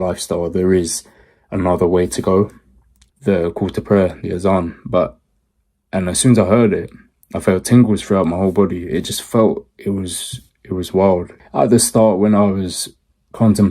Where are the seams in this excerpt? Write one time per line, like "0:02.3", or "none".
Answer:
0:03.0
0:11.4